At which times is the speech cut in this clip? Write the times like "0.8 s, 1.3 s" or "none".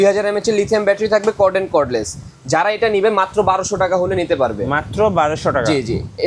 none

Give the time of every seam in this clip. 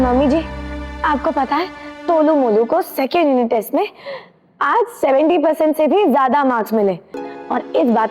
7.1 s

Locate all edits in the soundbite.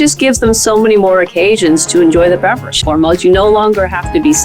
2.8 s

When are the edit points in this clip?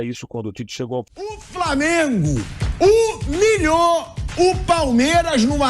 1.4 s

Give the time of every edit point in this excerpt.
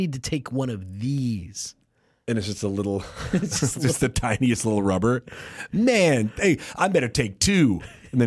none

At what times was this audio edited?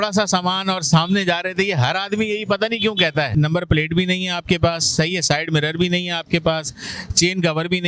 3.3 s

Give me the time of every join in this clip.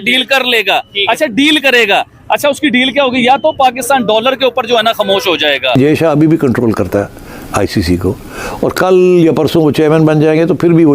5.8 s

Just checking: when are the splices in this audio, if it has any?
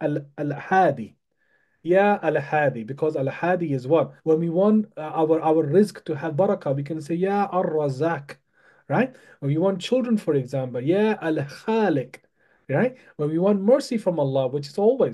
4.1 s

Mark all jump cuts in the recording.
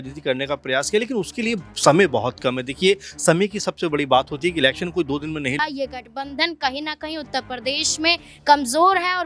5.6 s

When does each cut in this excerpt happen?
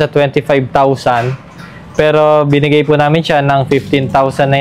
none

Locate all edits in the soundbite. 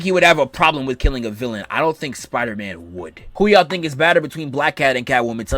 3.3 s

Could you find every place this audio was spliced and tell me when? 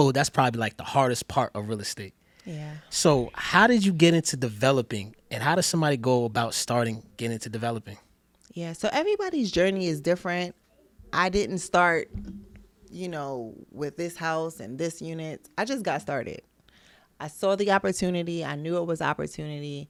none

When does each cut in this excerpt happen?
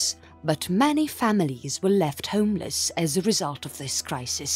3.1 s

